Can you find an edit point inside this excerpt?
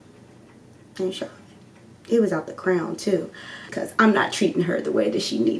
yes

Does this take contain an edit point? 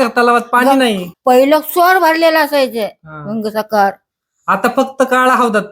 yes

